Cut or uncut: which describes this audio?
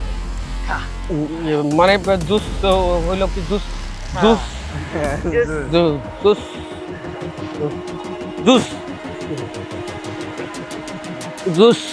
uncut